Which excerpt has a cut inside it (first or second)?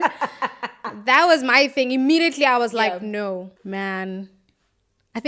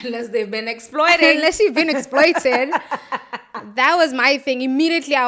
first